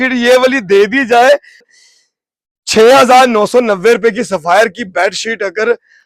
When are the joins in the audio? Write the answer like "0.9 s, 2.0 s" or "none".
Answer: 1.7 s